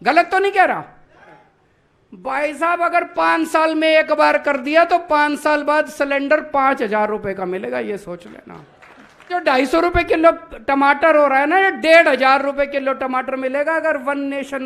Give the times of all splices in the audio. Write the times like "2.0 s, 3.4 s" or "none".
1.4 s, 9.4 s

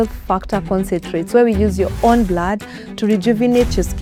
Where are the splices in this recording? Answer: none

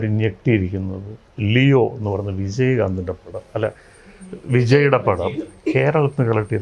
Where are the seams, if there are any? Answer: none

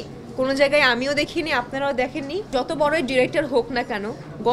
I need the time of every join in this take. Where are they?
2.5 s

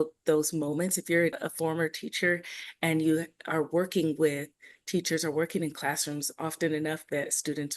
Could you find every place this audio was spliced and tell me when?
1.4 s

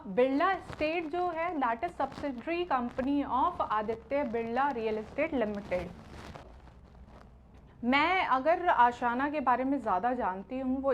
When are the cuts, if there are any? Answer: 6.5 s

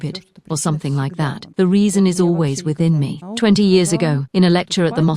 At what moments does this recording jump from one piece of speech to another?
1.4 s, 3.2 s, 4.2 s

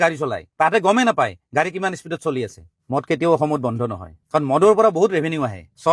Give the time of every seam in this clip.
2.7 s

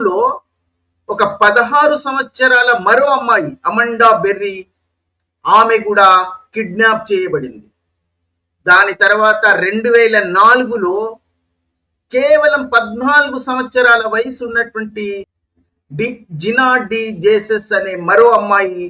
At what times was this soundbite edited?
none

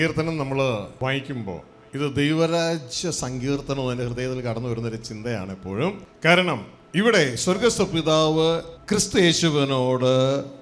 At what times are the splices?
0.9 s, 6.1 s, 8.7 s

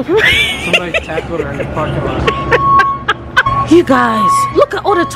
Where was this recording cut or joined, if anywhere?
3.5 s

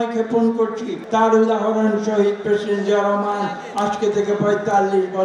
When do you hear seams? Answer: 1.0 s

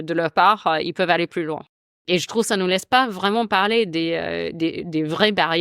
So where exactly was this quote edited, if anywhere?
2.0 s

